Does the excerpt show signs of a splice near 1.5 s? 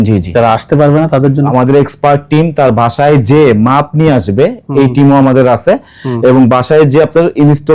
yes; 1 cut; at 1.5 s

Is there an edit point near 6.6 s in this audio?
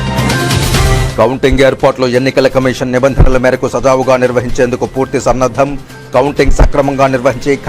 no; 1 cut; at 1.1 s

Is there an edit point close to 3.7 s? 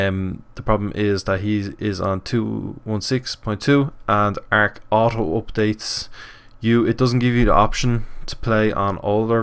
no; 1 cut; at 8.3 s

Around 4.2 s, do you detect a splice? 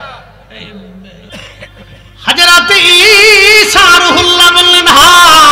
no; 1 cut; at 1.3 s

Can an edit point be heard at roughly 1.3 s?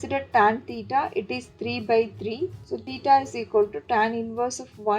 no; 1 cut; at 2.6 s

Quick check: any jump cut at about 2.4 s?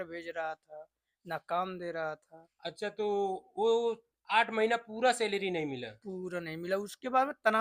no; 0 cuts

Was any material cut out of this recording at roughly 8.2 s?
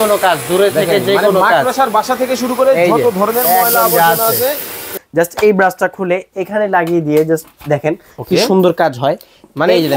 no; 1 cut; at 4.9 s

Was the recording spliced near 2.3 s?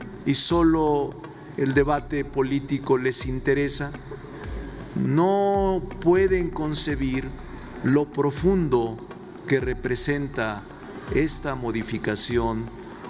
no; 0 cuts

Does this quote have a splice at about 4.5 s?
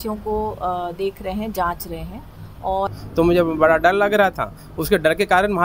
no; 1 cut; at 2.9 s

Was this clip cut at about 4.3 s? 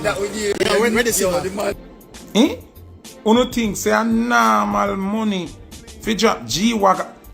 no; 1 cut; at 1.7 s

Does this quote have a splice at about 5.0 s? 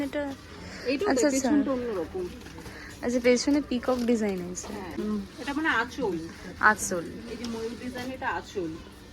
yes; 1 cut; at 5.0 s

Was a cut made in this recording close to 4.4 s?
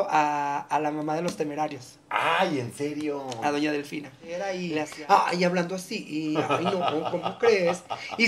yes; 1 cut; at 4.4 s

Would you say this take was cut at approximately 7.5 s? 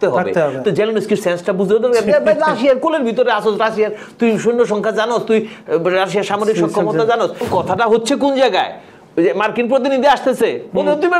yes; 1 cut; at 7.5 s

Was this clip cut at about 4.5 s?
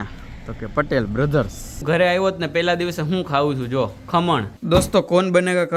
yes; 2 cuts; at 1.8 s, 4.5 s

